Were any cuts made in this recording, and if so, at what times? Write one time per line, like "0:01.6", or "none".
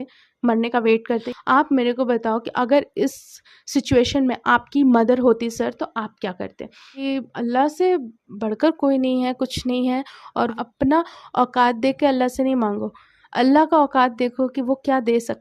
0:01.3
0:06.9
0:10.5